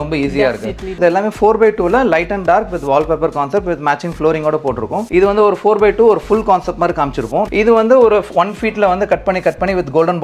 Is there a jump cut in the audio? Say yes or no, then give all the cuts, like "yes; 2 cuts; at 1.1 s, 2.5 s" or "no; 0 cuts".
yes; 3 cuts; at 1.0 s, 5.0 s, 7.5 s